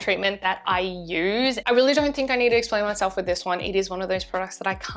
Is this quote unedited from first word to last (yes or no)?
no